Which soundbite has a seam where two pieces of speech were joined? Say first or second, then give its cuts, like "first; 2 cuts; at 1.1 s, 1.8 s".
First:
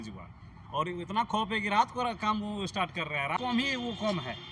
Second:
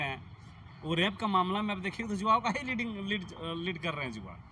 first; 1 cut; at 3.4 s